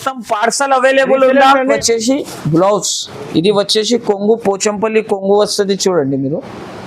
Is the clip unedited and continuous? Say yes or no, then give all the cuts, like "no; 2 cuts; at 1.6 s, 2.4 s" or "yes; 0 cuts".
no; 1 cut; at 1.8 s